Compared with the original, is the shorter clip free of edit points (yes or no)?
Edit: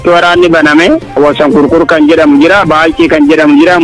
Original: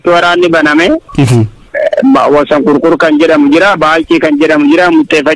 no